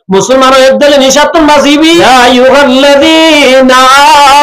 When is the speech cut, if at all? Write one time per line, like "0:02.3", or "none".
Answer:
0:02.0

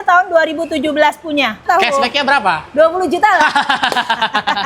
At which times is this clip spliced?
0:01.6

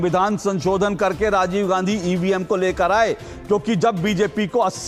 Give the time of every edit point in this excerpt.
none

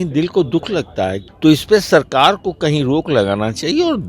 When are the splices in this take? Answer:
0:01.3

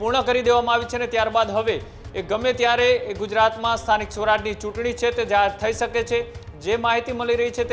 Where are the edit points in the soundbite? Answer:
none

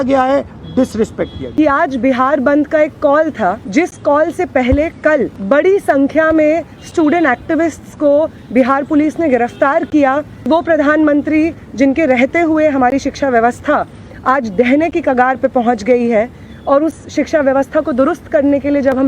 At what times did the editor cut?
0:01.4
0:03.6
0:05.4
0:10.5

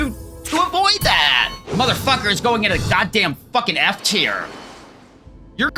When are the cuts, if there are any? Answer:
0:01.5

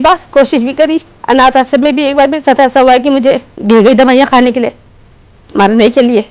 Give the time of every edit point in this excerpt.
none

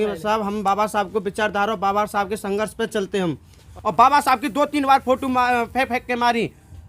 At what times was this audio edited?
0:03.7

